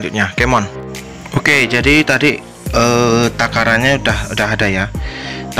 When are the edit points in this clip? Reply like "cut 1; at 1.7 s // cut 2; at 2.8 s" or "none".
cut 1; at 1.0 s